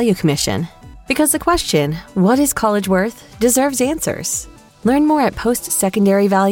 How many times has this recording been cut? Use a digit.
0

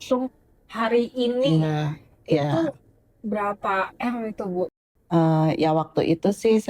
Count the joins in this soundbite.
1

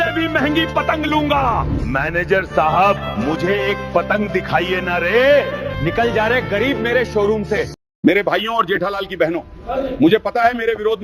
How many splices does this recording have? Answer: 1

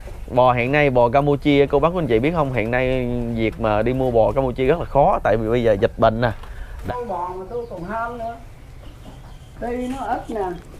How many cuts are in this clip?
1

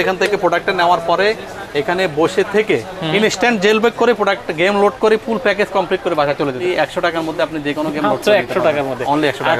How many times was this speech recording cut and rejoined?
1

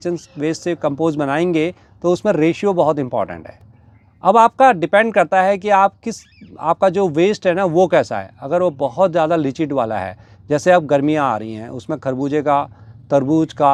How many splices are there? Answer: 0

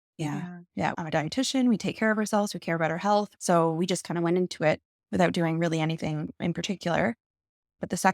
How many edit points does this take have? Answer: 2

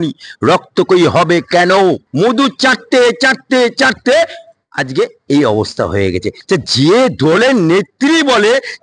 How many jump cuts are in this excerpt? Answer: 2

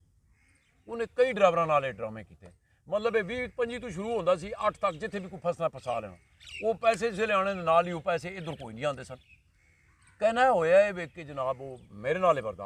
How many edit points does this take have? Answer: 0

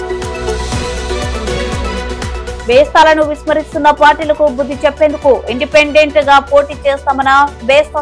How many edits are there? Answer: 1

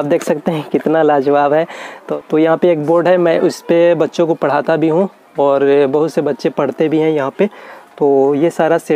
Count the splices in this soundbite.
1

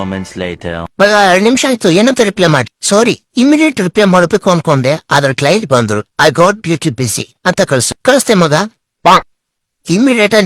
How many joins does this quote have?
1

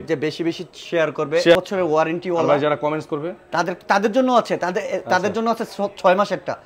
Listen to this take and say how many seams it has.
1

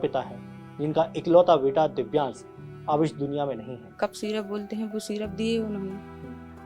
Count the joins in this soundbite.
1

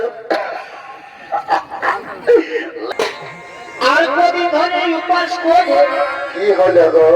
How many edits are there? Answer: 1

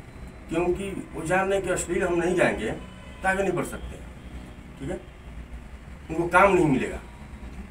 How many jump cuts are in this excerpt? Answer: 0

